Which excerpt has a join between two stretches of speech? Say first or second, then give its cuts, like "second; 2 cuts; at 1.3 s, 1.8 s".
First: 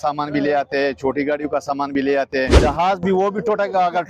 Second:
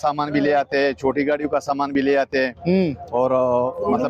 first; 1 cut; at 2.6 s